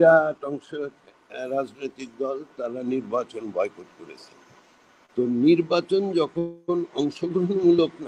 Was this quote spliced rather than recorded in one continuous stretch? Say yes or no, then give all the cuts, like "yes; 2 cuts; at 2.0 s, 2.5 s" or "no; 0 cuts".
no; 0 cuts